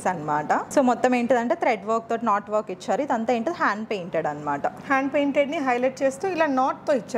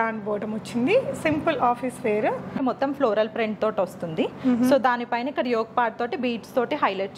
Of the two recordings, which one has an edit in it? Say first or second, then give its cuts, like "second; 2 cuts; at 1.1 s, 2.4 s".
second; 1 cut; at 2.6 s